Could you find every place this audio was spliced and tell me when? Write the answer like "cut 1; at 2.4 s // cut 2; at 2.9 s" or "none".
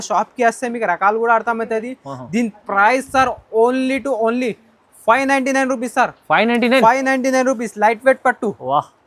none